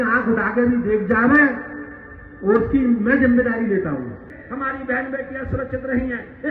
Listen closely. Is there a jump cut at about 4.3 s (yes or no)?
yes